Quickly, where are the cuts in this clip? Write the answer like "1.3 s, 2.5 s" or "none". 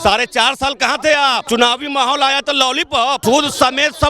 1.4 s, 3.2 s